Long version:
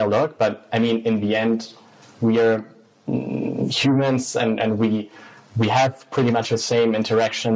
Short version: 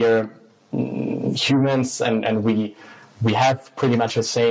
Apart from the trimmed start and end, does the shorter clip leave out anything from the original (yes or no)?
no